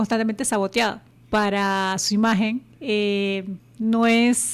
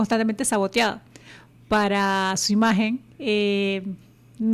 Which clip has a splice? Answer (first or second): first